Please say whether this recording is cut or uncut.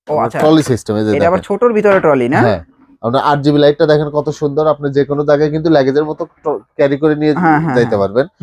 uncut